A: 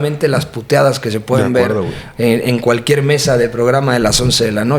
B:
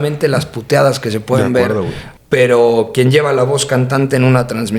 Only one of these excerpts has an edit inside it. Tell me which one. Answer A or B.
B